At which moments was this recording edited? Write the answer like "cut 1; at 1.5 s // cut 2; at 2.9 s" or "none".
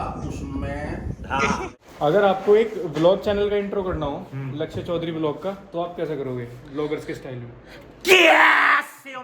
cut 1; at 1.6 s

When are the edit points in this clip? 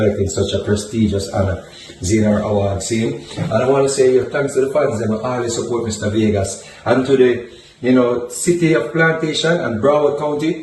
none

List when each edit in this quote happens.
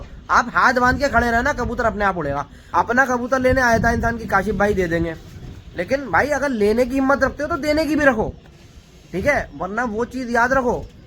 cut 1; at 2.5 s

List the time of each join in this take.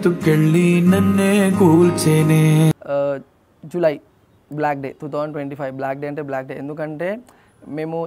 none

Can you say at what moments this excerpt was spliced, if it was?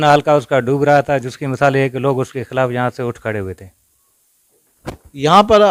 none

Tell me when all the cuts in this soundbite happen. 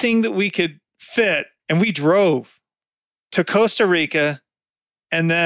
cut 1; at 1.5 s

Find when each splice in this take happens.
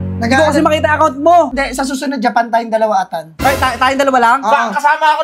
cut 1; at 1.5 s

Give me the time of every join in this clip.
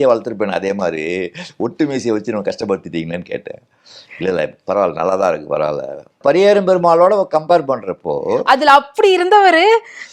cut 1; at 6.1 s

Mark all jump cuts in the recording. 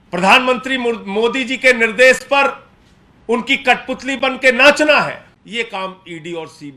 cut 1; at 5.3 s

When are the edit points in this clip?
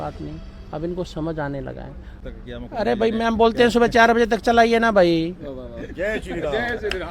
cut 1; at 2.2 s

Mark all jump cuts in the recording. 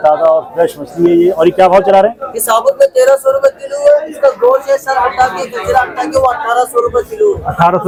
none

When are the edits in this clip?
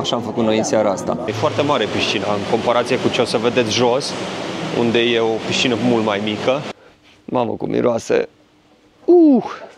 cut 1; at 1.3 s // cut 2; at 6.7 s

